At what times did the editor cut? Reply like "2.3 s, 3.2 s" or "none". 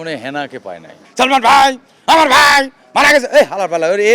1.0 s